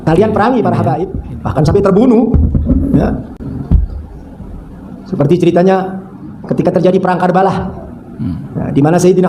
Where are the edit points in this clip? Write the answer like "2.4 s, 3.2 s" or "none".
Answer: 1.1 s